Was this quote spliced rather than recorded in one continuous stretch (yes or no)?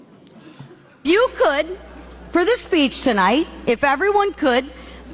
yes